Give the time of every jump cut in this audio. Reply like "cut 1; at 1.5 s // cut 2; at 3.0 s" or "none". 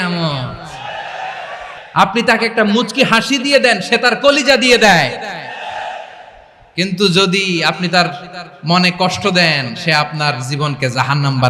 cut 1; at 1.8 s